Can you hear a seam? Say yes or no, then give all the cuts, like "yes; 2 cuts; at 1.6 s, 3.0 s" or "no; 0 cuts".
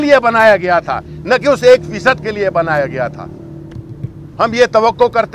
no; 0 cuts